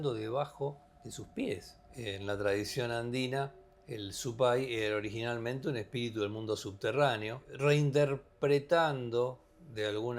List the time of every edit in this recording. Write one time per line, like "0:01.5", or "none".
0:01.8